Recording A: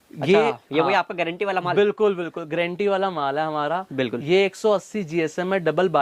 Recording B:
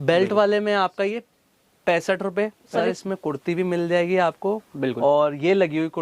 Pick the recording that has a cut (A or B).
B